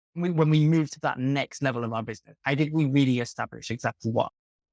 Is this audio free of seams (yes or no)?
yes